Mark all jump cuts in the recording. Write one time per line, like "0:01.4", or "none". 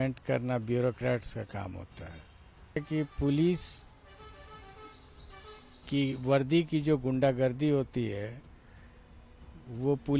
0:02.8